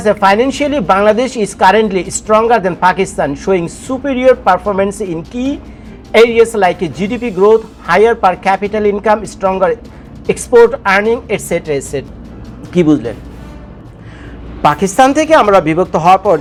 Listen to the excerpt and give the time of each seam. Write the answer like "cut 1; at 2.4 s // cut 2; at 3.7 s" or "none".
none